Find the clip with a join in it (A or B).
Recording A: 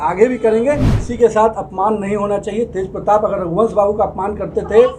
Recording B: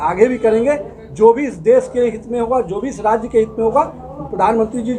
A